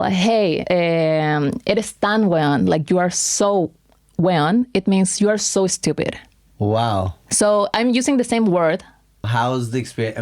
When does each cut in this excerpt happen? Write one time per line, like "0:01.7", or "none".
0:09.3